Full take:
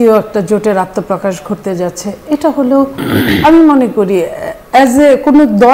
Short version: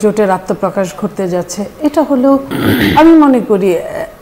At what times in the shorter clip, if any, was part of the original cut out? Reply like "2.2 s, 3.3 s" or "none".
none

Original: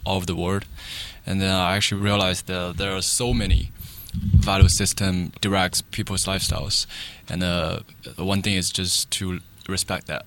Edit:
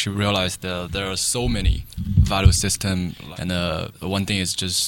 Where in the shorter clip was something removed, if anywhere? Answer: 1.9 s, 3.2 s, 3.9 s

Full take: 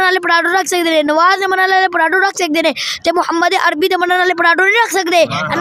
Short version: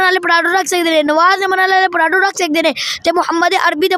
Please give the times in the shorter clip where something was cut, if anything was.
none

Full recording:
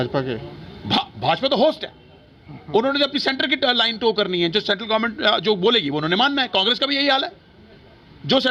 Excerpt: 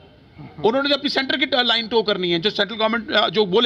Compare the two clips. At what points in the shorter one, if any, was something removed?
none

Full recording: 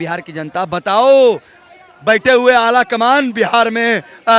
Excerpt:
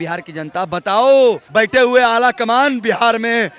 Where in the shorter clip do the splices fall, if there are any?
1.4 s

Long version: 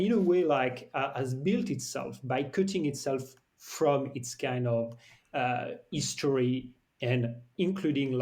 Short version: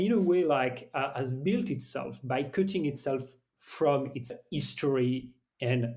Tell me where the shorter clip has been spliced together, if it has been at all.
4.3 s

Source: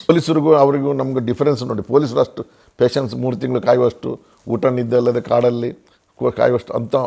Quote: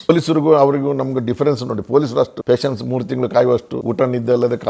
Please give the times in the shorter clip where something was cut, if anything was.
2.4 s, 3.8 s

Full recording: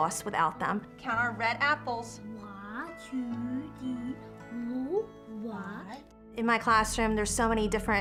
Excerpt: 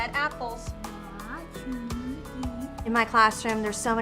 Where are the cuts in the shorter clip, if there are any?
2.8 s

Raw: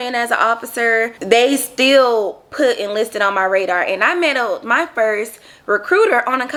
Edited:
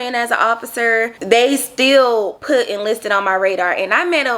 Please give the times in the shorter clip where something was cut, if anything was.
2.4 s

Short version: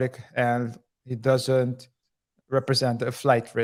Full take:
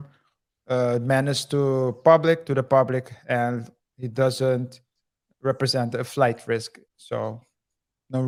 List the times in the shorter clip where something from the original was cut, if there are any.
none

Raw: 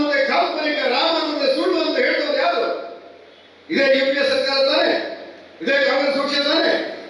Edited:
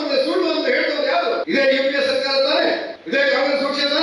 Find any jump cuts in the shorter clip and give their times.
1.4 s, 2.9 s

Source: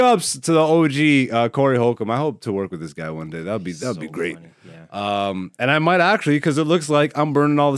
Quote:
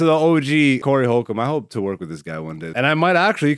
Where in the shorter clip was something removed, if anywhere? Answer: 0.8 s, 2.7 s

